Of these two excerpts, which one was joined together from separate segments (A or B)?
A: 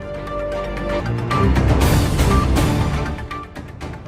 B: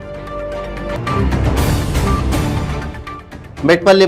B